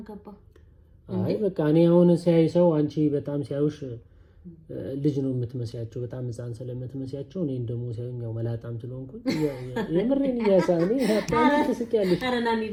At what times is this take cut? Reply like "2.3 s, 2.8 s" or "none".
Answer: none